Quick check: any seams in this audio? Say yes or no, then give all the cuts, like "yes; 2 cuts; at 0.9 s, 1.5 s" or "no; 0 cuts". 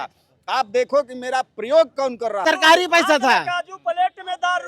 yes; 1 cut; at 2.4 s